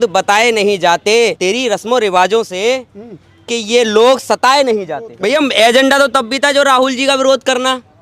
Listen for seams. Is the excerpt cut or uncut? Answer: cut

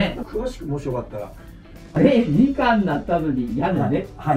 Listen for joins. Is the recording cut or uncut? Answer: cut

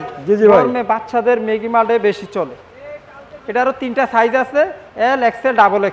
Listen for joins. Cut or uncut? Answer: uncut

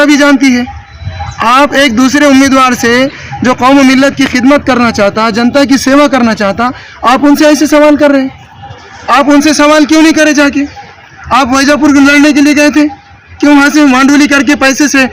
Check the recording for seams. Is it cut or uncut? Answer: uncut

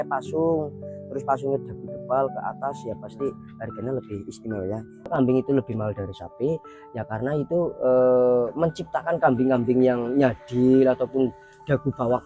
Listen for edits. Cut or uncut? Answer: cut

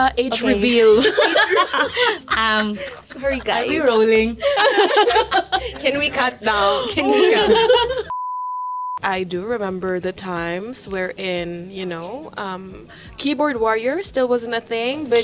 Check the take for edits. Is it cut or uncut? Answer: uncut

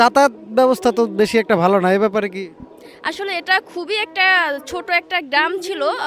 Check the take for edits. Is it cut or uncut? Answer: uncut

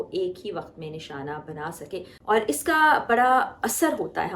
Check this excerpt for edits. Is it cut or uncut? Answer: cut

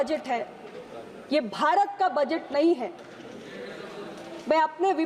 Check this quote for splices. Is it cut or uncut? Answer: uncut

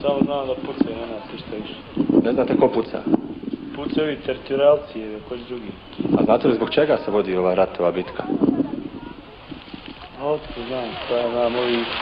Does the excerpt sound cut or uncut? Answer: uncut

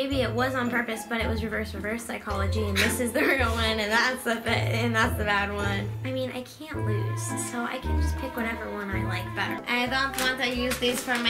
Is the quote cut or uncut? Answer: cut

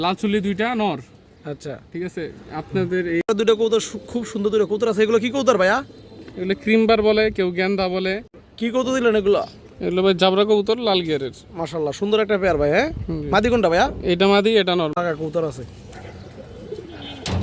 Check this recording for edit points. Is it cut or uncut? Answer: cut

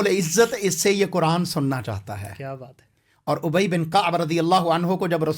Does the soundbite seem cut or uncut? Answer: uncut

